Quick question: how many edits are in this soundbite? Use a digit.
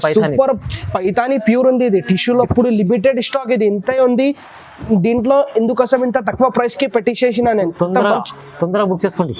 1